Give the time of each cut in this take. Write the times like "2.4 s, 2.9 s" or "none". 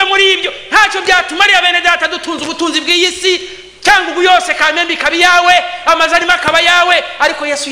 none